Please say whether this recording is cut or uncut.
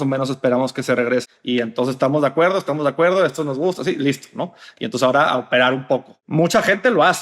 cut